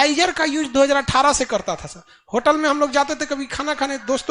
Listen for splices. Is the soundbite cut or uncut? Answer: uncut